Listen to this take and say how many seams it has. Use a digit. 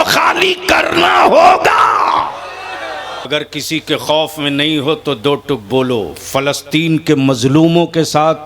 1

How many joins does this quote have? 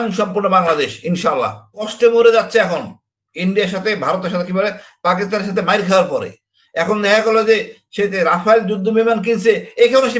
1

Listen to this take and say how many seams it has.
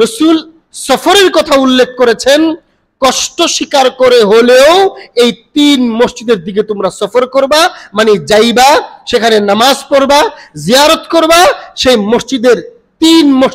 0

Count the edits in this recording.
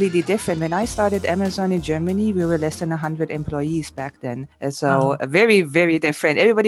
0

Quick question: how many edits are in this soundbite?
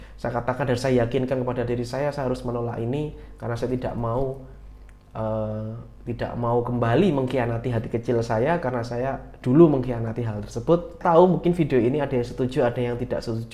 1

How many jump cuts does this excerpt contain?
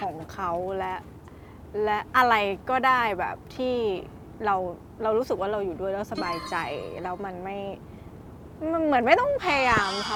0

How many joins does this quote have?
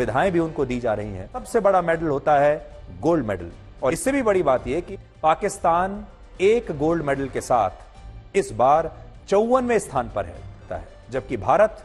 4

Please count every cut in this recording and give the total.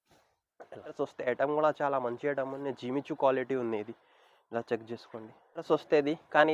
2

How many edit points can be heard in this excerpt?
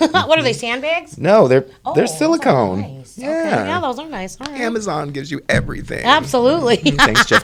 0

